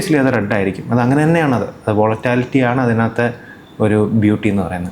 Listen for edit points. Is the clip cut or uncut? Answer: uncut